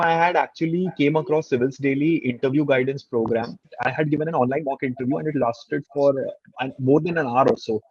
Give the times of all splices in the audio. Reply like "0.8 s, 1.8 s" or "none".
3.6 s